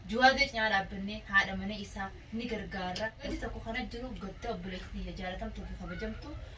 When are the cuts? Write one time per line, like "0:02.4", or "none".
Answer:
0:03.3